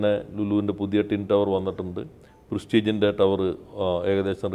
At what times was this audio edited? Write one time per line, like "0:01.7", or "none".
none